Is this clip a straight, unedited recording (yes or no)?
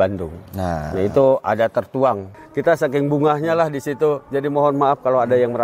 no